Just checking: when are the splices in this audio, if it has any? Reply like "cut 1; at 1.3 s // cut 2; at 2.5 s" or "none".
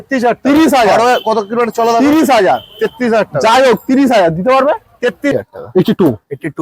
cut 1; at 5.3 s